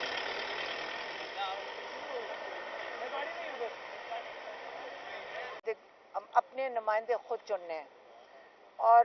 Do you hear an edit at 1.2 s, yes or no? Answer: yes